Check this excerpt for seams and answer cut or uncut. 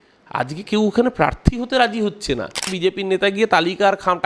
cut